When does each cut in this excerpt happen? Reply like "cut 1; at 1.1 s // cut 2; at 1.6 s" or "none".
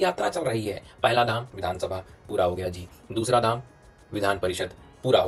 none